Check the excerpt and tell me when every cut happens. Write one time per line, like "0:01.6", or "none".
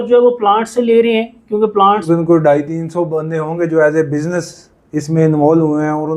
0:02.1